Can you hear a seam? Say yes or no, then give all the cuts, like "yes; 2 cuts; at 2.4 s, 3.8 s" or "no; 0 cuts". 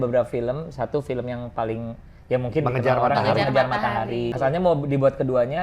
yes; 1 cut; at 4.3 s